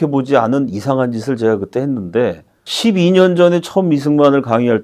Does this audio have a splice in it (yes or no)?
yes